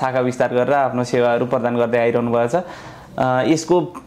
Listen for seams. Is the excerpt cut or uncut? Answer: uncut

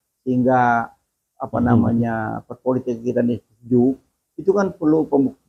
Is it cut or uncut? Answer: uncut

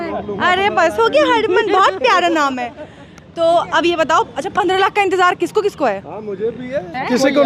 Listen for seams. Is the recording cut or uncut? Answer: uncut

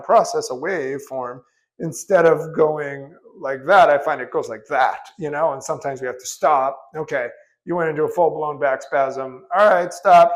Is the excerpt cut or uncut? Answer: uncut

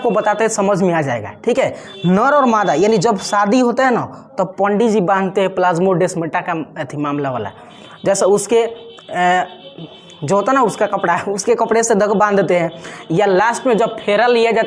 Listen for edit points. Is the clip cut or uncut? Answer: uncut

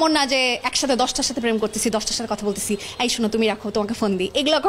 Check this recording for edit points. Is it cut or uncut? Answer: uncut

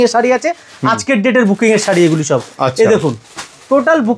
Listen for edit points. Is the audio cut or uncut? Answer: uncut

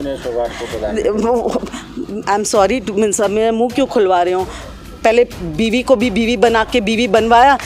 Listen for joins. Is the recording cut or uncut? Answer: uncut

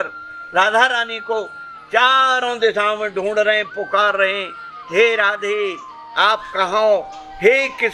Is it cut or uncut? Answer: uncut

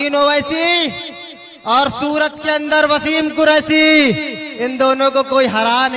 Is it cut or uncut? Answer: uncut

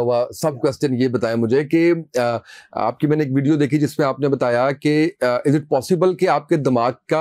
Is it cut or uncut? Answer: uncut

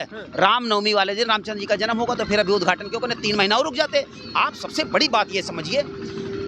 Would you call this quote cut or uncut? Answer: uncut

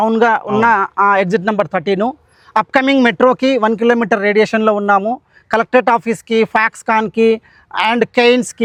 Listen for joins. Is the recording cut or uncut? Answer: uncut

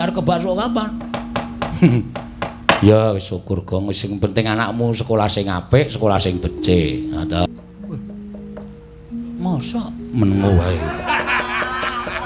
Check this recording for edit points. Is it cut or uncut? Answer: cut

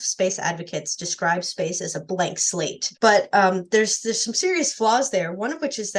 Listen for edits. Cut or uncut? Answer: cut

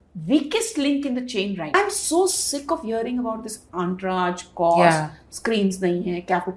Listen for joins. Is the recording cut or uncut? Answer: cut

